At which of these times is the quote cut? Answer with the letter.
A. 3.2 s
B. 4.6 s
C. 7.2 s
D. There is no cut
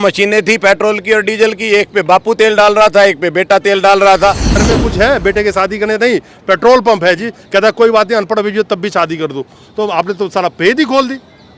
B